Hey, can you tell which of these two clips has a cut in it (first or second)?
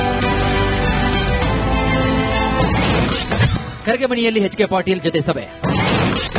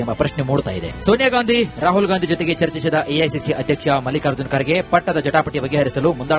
first